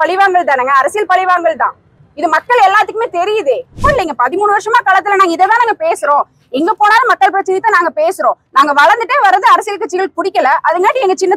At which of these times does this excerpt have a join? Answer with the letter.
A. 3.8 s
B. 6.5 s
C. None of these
A